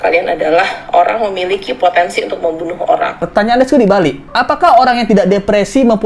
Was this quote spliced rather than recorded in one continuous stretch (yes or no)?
yes